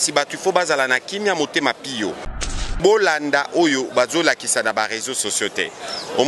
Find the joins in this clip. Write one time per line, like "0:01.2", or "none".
0:02.4